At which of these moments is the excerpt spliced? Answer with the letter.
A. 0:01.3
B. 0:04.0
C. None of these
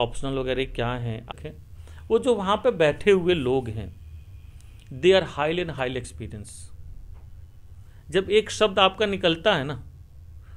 A